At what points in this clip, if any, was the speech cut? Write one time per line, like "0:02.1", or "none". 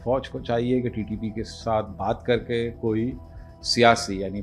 none